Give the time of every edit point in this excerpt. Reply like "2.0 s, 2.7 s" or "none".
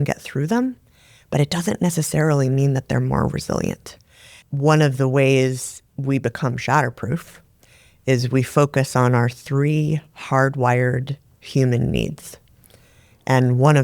4.3 s